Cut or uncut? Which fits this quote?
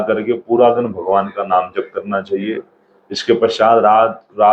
uncut